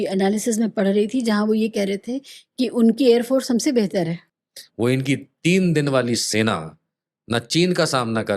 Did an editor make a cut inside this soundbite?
yes; 1 cut; at 4.3 s

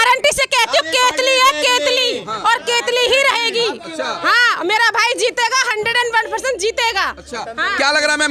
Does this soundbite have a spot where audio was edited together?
no; 0 cuts

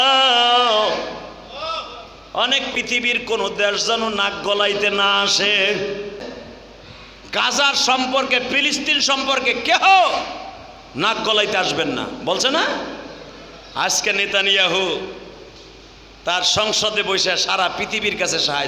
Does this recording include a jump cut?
yes; 1 cut; at 2.7 s

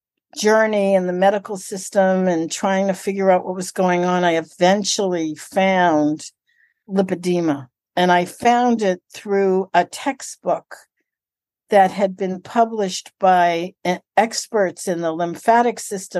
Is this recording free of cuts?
no; 1 cut; at 7.8 s

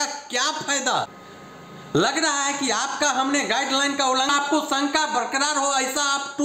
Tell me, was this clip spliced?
yes; 2 cuts; at 1.1 s, 4.3 s

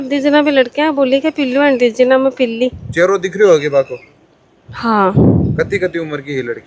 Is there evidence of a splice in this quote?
no; 0 cuts

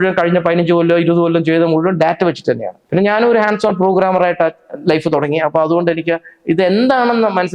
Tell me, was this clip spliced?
yes; 1 cut; at 2.7 s

